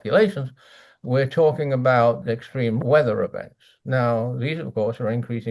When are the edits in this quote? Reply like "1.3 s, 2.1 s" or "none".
2.2 s